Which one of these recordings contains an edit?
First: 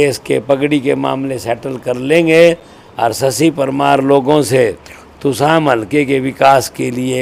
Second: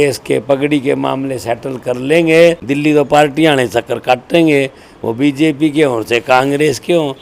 second; 1 cut; at 2.6 s

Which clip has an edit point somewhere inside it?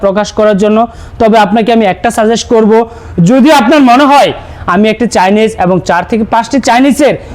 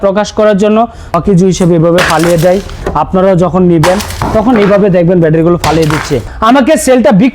second; 2 cuts; at 1.0 s, 6.3 s

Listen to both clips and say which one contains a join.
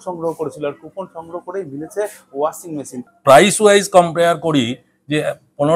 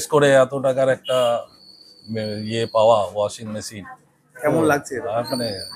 first; 1 cut; at 3.0 s

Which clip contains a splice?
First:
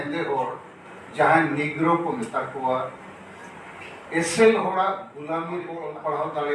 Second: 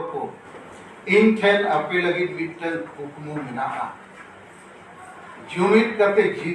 first; 1 cut; at 5.5 s

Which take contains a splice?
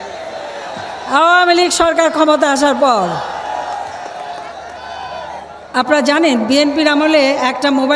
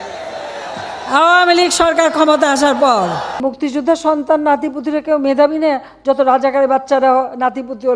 second; 1 cut; at 3.4 s

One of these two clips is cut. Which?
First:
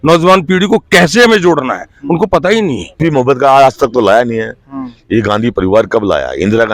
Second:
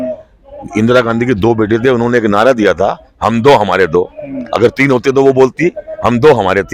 first; 1 cut; at 2.9 s

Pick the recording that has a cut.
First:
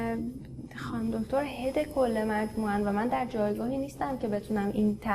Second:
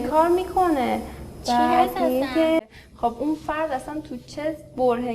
second; 1 cut; at 2.6 s

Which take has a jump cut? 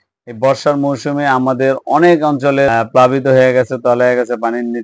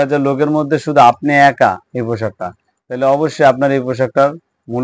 first; 1 cut; at 2.7 s

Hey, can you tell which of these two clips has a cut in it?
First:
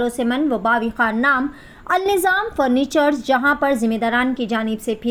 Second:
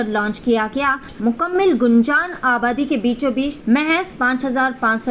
second; 2 cuts; at 1.1 s, 3.6 s

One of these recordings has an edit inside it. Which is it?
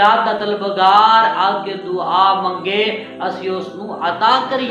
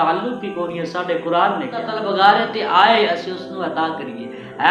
second; 1 cut; at 2.0 s

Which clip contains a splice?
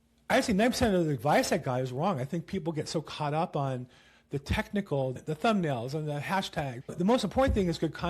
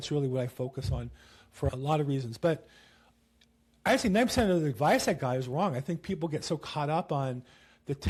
first; 1 cut; at 6.8 s

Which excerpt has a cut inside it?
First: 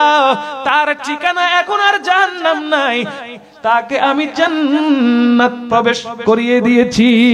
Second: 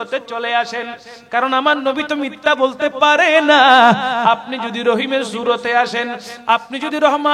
first; 1 cut; at 5.6 s

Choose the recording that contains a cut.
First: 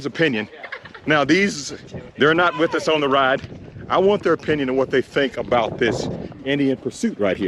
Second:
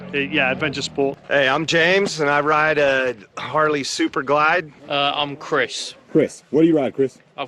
second; 2 cuts; at 1.2 s, 4.8 s

